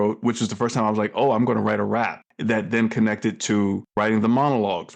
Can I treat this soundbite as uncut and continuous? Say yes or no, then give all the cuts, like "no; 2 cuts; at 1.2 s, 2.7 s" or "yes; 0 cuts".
no; 2 cuts; at 2.2 s, 3.9 s